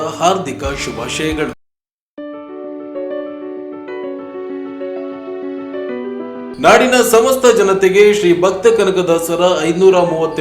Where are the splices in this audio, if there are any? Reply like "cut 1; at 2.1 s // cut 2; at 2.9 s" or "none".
cut 1; at 1.6 s